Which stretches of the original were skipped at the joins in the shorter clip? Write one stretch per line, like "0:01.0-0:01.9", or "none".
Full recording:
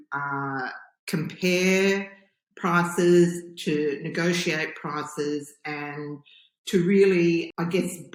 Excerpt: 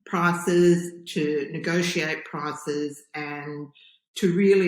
none